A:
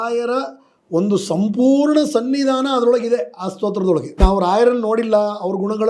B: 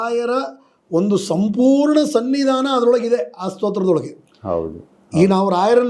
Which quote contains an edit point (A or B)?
A